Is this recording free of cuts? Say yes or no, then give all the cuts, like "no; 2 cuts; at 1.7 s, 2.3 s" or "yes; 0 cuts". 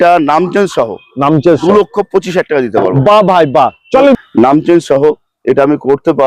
no; 1 cut; at 4.2 s